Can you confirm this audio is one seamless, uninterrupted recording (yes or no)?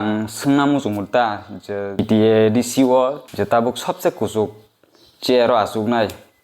no